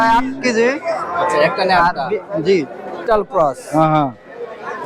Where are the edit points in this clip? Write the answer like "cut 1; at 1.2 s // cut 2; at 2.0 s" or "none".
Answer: cut 1; at 3.0 s

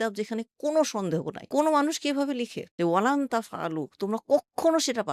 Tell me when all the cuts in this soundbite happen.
cut 1; at 2.6 s

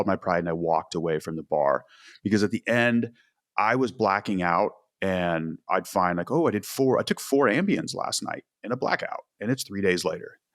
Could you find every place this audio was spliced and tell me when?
none

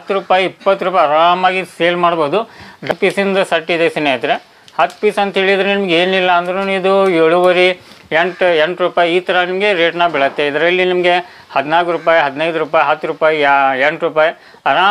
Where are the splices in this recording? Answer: cut 1; at 2.9 s

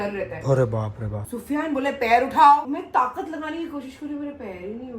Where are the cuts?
cut 1; at 1.2 s

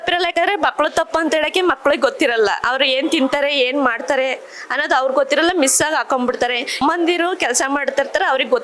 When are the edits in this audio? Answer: cut 1; at 6.8 s

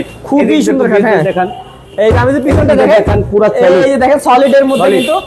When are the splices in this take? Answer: none

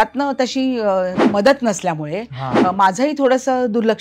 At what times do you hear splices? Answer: cut 1; at 1.2 s

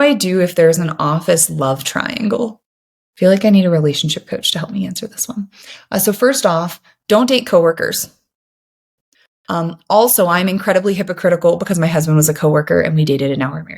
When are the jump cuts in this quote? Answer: cut 1; at 2.8 s

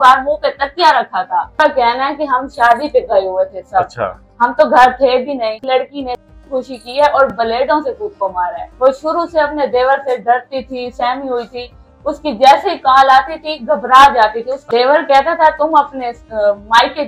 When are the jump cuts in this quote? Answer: cut 1; at 1.5 s // cut 2; at 5.6 s // cut 3; at 8.7 s // cut 4; at 14.5 s

